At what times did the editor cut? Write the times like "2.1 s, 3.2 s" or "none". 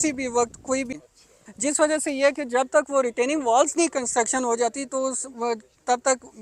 0.9 s